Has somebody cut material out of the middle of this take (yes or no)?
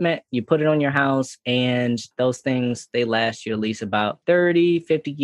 yes